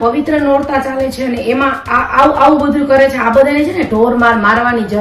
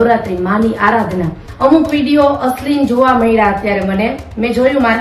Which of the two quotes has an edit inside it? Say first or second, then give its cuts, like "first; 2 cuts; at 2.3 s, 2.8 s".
second; 1 cut; at 1.4 s